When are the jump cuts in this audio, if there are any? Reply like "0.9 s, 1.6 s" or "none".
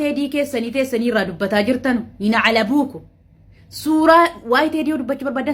none